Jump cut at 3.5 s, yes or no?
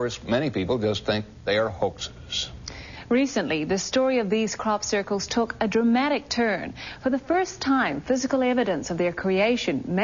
yes